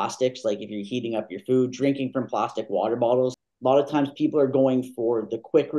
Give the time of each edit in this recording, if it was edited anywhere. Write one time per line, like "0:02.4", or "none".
0:03.4